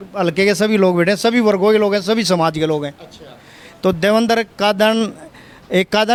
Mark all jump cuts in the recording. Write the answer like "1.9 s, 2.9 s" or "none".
none